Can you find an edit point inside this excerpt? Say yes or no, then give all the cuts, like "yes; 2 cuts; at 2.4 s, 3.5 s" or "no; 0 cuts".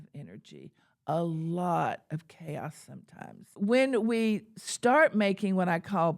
yes; 1 cut; at 3.4 s